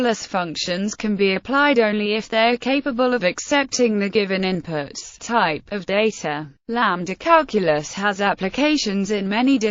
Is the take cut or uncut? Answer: cut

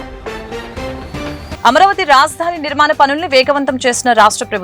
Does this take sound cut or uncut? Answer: uncut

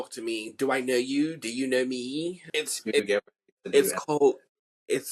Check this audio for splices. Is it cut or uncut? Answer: cut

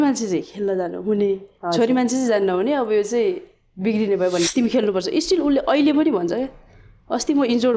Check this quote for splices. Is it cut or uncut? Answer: cut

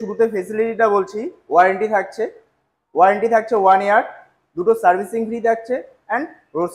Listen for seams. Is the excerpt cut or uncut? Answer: uncut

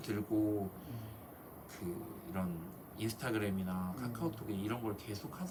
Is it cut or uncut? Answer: uncut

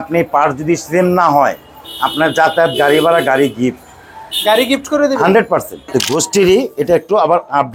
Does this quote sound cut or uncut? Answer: cut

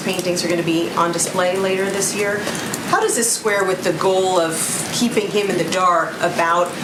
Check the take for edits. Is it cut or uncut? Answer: uncut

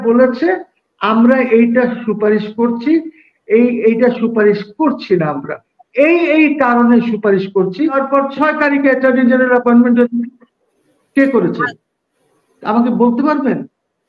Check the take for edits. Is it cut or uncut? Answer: cut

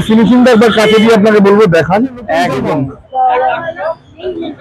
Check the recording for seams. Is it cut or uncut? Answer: cut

